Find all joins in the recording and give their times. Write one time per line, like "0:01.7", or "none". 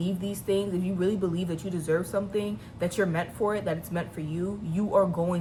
none

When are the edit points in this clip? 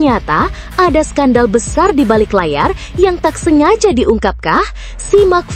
none

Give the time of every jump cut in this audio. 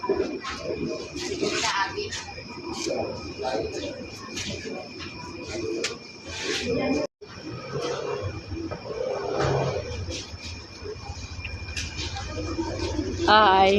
0:07.1

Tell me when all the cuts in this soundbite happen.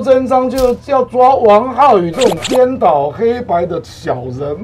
none

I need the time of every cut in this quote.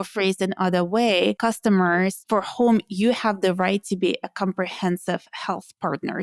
0:01.4
0:02.2

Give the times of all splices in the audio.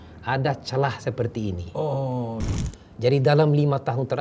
0:02.5

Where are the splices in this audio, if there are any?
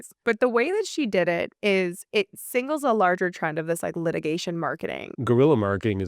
0:05.1

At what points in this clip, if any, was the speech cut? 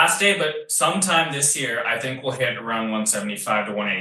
none

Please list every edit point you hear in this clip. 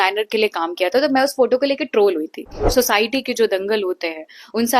0:02.6

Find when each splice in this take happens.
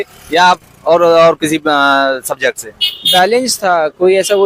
none

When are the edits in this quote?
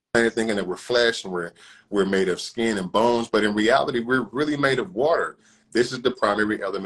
none

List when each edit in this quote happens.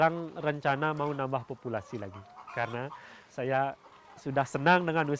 none

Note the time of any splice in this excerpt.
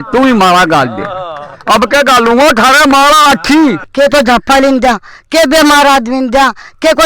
0:03.8

